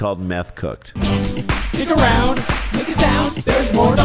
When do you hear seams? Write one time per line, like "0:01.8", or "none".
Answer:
0:00.9